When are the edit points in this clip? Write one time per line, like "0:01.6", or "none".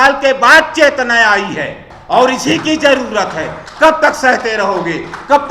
0:01.9